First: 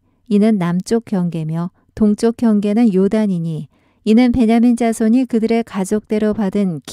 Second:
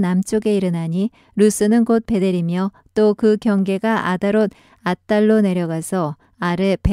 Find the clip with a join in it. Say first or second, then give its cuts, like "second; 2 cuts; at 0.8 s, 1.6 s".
first; 1 cut; at 1.9 s